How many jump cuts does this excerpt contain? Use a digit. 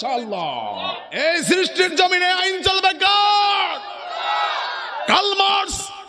1